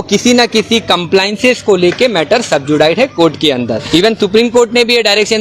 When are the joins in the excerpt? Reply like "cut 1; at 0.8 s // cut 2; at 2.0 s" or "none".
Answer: cut 1; at 3.8 s